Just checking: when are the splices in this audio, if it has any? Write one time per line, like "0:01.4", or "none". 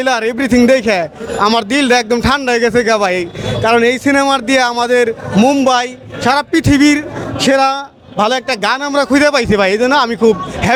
none